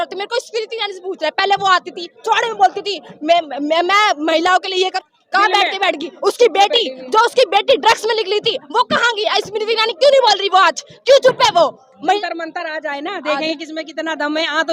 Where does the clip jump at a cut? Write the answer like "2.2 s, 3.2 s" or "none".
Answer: 5.0 s, 12.1 s